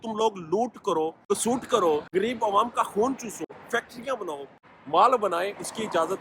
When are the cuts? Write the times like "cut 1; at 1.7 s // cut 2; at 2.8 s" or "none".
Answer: cut 1; at 1.2 s // cut 2; at 2.1 s // cut 3; at 3.5 s // cut 4; at 4.6 s